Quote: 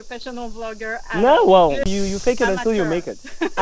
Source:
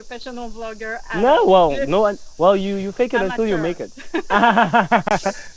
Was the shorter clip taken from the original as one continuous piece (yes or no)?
no